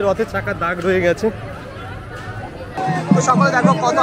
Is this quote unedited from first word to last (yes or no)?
no